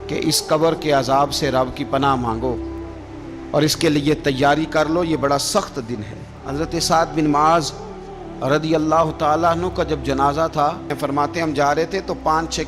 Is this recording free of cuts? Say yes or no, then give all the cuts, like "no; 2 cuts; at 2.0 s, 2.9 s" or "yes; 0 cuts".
no; 2 cuts; at 6.4 s, 10.9 s